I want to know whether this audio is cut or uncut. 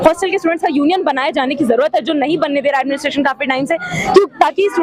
uncut